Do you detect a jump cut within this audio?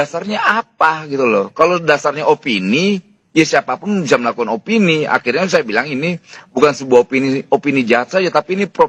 no; 0 cuts

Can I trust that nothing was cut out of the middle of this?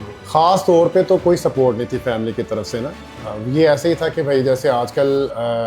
yes; 0 cuts

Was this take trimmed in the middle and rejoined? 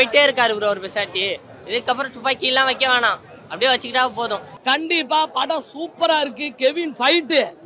yes; 1 cut; at 4.5 s

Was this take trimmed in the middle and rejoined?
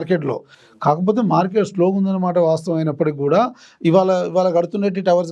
no; 0 cuts

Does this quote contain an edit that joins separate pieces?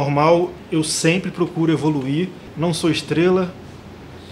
yes; 1 cut; at 2.4 s

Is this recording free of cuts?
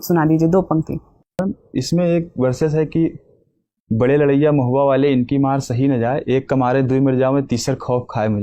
no; 1 cut; at 1.4 s

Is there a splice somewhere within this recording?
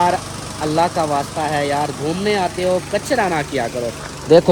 no; 0 cuts

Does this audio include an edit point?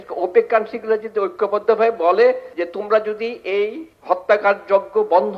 yes; 2 cuts; at 2.5 s, 3.9 s

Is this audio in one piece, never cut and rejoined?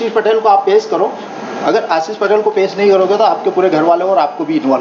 yes; 0 cuts

